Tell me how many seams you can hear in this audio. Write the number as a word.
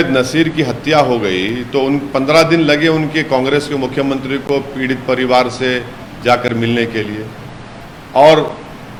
zero